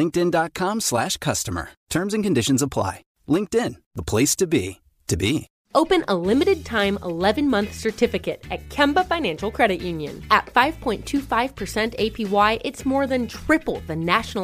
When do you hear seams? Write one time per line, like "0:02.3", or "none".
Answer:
0:05.6